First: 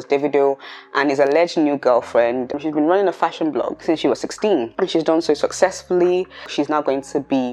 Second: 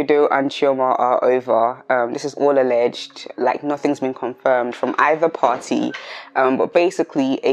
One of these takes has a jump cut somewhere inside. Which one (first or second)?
first